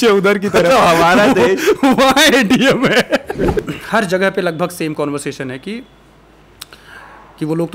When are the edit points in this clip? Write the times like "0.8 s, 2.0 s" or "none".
3.6 s

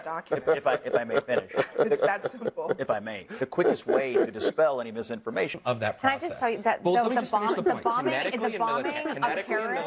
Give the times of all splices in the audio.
5.6 s

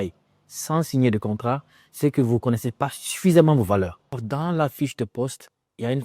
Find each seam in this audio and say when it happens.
4.4 s

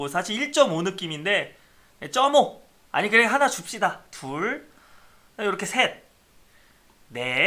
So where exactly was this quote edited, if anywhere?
none

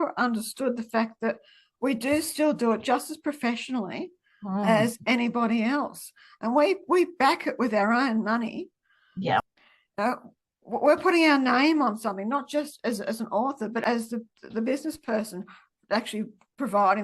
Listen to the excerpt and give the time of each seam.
none

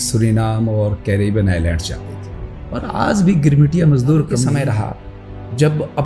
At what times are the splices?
4.5 s

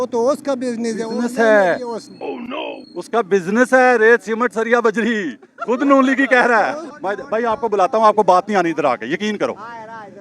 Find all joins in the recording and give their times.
6.9 s

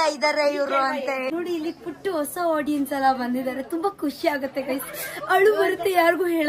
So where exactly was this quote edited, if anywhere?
1.3 s

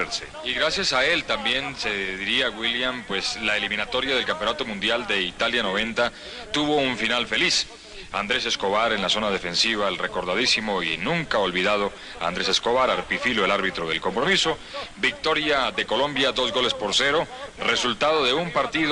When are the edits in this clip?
17.8 s

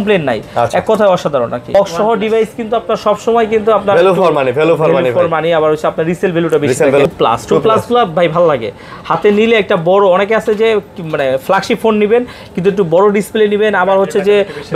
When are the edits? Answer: 1.7 s, 7.1 s

